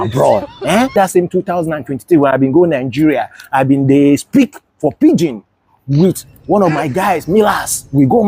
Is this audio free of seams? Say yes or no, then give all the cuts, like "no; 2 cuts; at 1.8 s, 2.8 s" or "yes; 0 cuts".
no; 1 cut; at 1.0 s